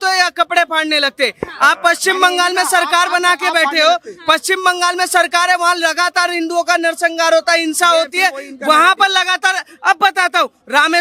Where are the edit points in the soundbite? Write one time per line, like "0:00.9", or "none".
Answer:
none